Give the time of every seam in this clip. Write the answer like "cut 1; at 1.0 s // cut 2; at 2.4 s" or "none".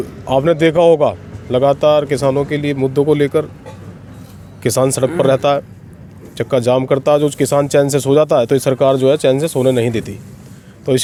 none